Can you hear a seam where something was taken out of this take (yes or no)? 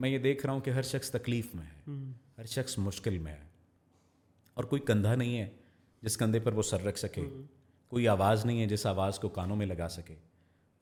no